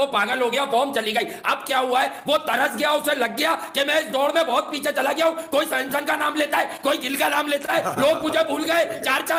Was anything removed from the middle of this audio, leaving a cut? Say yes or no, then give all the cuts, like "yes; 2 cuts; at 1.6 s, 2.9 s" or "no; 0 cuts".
no; 0 cuts